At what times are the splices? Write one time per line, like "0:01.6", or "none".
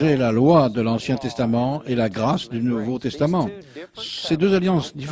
none